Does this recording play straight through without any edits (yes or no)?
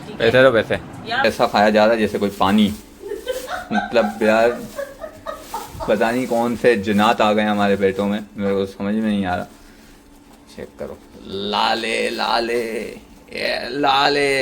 no